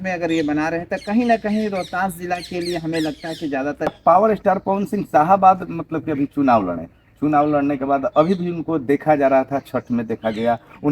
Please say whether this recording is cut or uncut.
cut